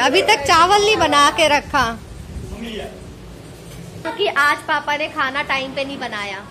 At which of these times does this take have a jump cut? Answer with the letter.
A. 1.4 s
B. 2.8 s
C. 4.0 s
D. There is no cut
C